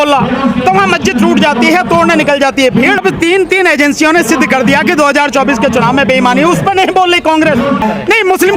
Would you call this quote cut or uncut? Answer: cut